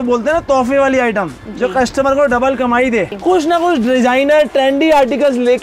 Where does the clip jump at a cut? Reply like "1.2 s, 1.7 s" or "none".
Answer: 3.1 s